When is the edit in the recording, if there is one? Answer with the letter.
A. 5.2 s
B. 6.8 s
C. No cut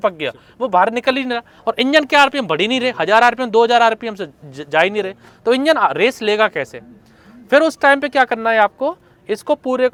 C